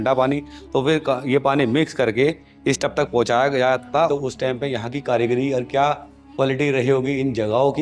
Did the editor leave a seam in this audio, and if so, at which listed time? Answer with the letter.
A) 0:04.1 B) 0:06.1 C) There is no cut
A